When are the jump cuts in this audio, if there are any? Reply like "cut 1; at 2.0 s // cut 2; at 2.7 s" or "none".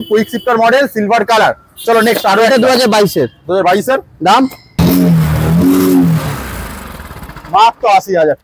cut 1; at 4.8 s